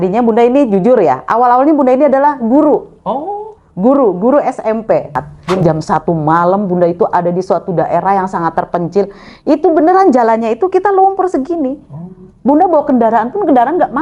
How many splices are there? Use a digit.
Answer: 1